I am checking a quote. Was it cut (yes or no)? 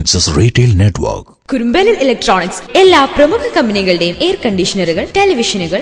no